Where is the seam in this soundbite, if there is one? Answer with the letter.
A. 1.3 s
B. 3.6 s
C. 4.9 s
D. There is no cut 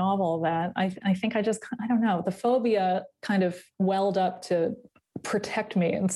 B